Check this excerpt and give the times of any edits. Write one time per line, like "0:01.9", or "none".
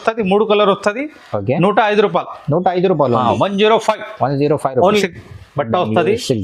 0:05.0